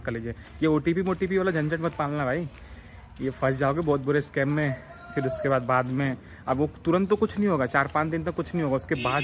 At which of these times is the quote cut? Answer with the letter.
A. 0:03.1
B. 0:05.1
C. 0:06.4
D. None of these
D